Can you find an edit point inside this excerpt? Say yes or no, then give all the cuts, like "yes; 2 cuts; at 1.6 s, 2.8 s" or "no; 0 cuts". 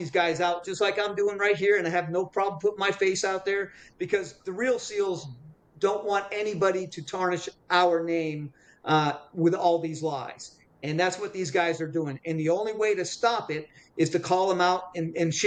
no; 0 cuts